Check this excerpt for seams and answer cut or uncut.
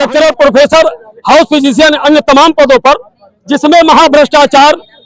uncut